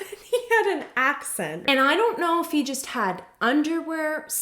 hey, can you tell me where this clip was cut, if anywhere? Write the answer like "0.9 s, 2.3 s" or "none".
1.6 s